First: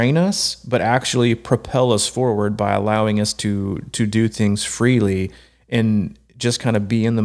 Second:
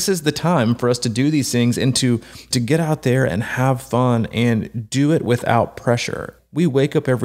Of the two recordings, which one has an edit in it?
second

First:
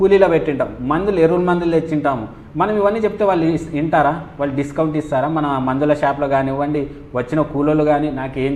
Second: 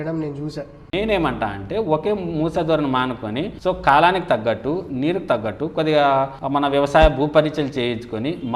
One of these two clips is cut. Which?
second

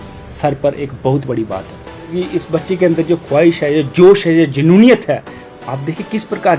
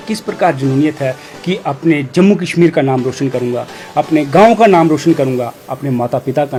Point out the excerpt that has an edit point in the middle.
first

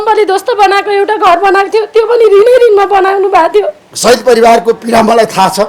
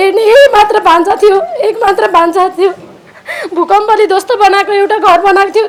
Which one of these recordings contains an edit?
first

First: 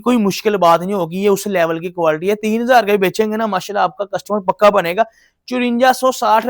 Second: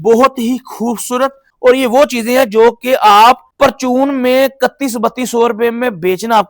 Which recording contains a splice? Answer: second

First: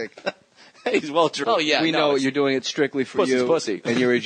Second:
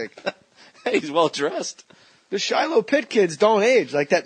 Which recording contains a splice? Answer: second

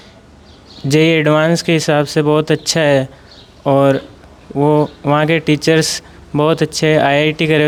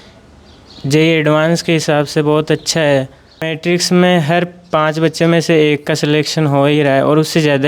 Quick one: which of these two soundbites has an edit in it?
second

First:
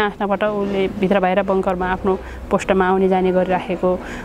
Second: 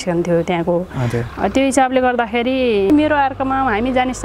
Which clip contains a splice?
second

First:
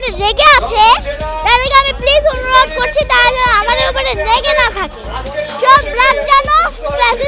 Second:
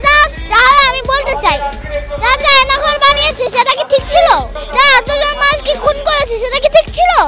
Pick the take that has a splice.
second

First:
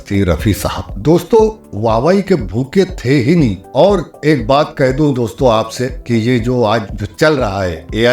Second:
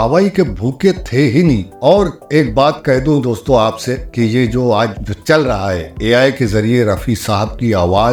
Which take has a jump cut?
first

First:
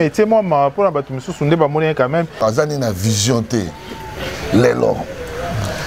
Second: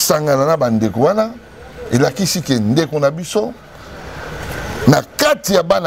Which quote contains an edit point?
first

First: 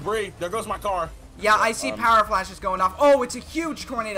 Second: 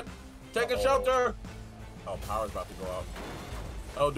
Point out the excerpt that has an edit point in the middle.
first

